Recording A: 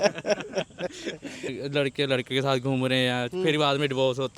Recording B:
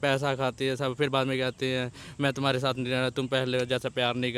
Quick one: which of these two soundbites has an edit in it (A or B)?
A